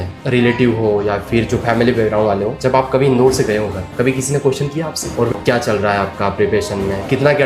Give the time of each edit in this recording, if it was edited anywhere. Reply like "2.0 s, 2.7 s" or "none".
5.3 s